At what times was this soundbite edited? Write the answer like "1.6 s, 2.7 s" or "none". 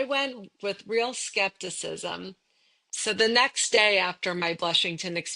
2.9 s